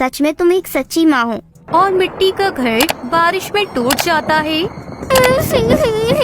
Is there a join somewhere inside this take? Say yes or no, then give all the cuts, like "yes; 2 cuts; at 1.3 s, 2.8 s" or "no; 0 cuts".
yes; 1 cut; at 1.6 s